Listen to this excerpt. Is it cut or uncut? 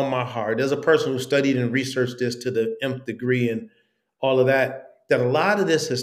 uncut